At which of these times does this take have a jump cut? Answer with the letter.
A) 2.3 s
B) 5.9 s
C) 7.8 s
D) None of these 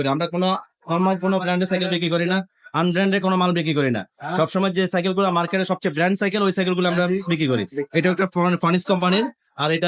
D